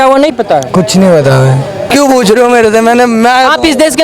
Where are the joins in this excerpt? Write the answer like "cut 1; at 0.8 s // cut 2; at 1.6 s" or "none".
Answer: cut 1; at 1.9 s